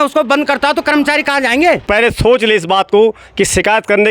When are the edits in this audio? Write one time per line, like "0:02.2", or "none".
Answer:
0:01.8